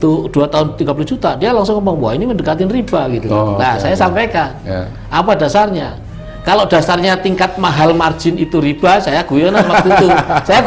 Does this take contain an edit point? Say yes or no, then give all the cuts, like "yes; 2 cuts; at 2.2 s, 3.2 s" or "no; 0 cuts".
no; 0 cuts